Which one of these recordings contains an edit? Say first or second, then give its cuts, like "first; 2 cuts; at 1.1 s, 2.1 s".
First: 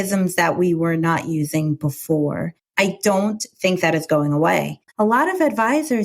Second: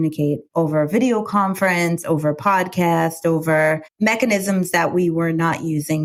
first; 1 cut; at 4.9 s